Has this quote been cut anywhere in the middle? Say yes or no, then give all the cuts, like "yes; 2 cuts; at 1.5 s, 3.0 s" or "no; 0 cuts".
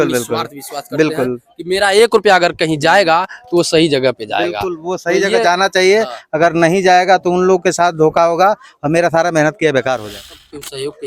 yes; 1 cut; at 10.0 s